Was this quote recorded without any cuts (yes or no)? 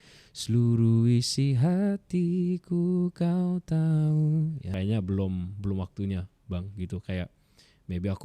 no